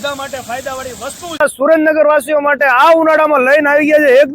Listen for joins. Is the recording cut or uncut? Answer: cut